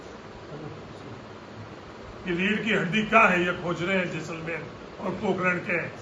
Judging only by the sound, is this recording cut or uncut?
uncut